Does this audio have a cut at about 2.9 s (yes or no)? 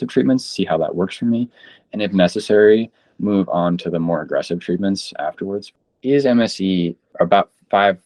no